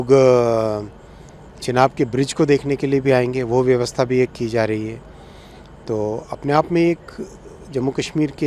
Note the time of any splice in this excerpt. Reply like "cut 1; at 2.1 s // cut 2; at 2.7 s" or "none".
none